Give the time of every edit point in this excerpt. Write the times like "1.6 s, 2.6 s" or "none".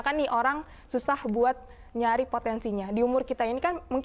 none